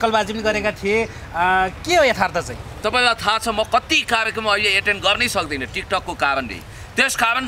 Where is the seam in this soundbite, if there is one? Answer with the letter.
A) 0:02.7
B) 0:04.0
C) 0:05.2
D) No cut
A